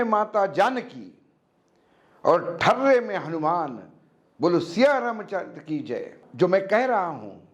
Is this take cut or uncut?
cut